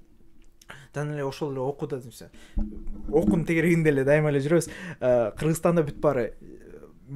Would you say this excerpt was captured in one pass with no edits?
yes; 0 cuts

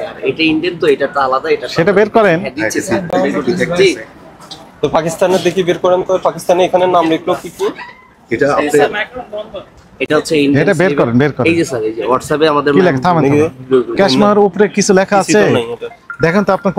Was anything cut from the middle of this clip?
no; 0 cuts

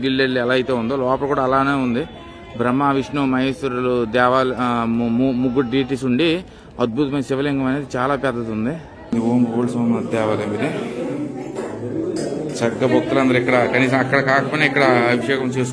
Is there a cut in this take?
yes; 1 cut; at 9.1 s

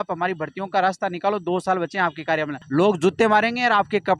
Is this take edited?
yes; 1 cut; at 2.6 s

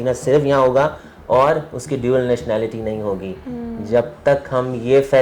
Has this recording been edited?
no; 0 cuts

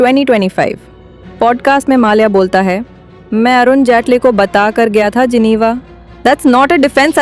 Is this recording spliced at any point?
no; 0 cuts

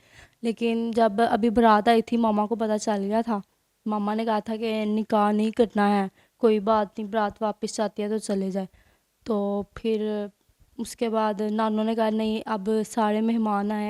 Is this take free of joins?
yes; 0 cuts

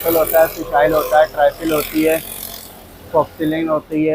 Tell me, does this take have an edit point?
no; 0 cuts

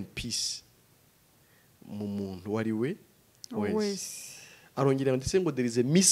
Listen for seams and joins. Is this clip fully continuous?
yes; 0 cuts

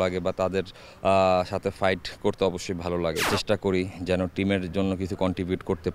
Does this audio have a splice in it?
yes; 1 cut; at 3.3 s

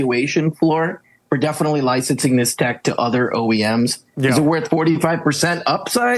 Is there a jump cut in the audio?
no; 0 cuts

